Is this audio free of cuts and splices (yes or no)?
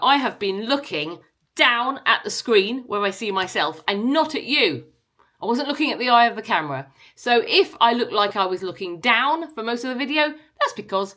yes